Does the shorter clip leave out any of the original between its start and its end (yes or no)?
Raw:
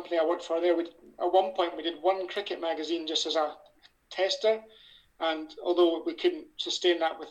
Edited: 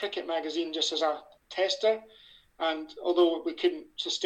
yes